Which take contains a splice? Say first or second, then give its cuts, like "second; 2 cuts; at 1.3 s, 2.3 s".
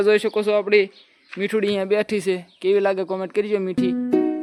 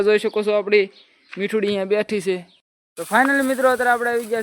second; 1 cut; at 2.5 s